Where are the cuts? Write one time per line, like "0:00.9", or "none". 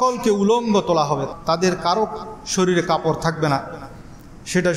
0:01.3